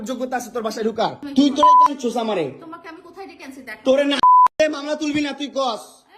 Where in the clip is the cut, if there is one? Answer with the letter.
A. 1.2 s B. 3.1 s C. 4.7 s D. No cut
A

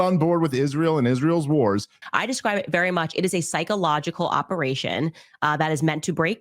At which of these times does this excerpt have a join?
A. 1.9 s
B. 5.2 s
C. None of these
A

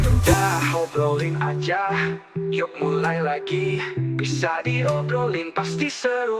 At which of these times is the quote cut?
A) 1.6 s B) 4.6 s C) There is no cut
C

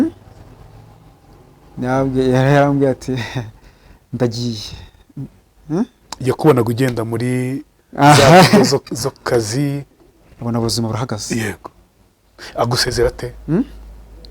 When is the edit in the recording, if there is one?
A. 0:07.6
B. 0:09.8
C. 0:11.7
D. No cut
B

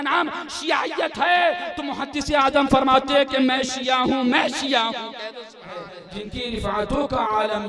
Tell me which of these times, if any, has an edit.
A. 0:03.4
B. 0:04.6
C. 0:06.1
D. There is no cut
C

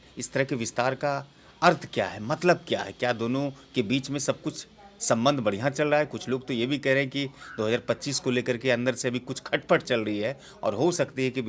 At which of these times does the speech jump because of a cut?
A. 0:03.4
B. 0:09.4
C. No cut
C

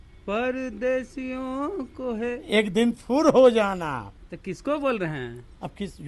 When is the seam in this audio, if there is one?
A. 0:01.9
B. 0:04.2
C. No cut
C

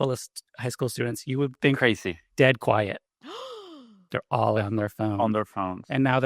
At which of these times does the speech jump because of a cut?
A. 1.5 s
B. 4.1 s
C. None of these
B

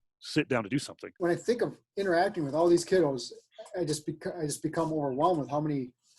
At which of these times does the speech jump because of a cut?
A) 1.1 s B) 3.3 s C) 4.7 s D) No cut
A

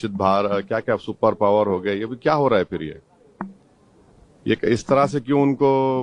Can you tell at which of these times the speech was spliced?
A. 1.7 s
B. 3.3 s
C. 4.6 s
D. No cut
D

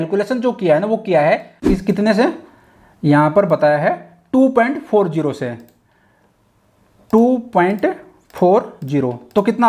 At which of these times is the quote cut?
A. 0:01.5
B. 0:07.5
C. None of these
A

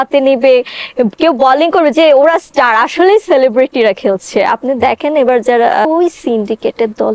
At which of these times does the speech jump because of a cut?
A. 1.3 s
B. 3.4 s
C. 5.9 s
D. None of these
C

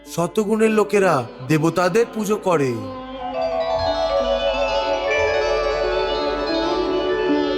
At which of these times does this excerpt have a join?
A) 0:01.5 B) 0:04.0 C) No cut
C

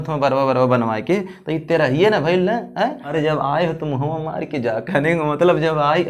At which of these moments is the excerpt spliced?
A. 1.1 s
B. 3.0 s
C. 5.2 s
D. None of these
B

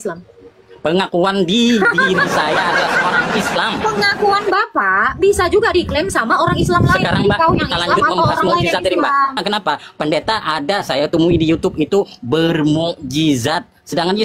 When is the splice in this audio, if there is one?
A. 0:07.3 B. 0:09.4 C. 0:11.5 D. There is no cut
B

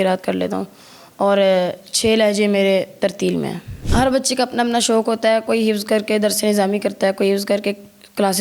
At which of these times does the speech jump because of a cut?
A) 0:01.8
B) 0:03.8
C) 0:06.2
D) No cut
B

